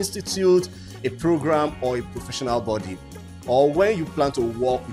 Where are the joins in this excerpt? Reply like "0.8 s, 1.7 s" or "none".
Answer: none